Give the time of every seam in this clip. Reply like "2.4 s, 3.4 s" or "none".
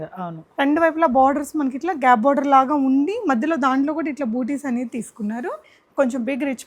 5.8 s